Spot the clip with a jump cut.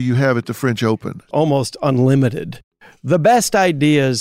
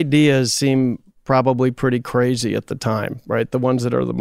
first; 2 cuts; at 1.3 s, 2.7 s

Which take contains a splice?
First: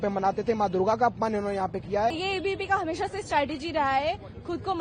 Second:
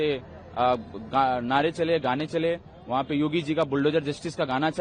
first; 1 cut; at 2.2 s

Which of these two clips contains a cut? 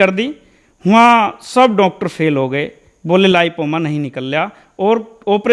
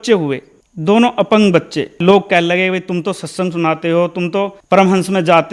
second; 2 cuts; at 2.0 s, 4.6 s

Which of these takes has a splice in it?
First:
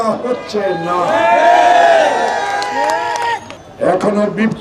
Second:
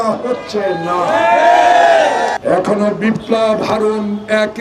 second; 1 cut; at 2.4 s

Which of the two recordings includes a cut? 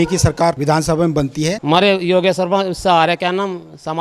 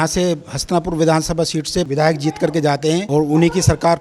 first; 1 cut; at 1.6 s

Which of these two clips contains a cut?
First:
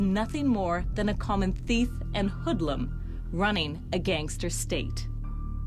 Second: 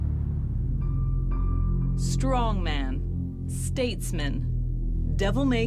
second; 1 cut; at 3.8 s

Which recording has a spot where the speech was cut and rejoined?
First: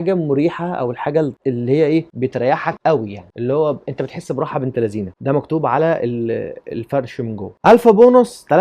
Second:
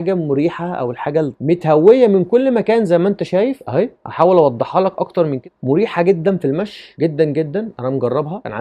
second; 2 cuts; at 1.4 s, 5.4 s

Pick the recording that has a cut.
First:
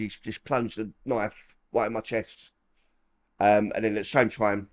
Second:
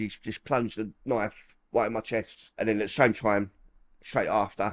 second; 1 cut; at 2.6 s

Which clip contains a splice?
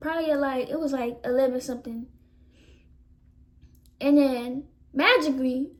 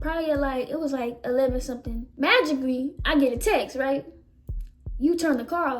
second; 1 cut; at 2.0 s

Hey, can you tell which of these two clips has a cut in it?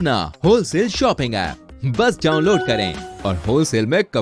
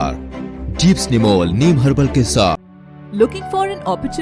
second; 1 cut; at 2.6 s

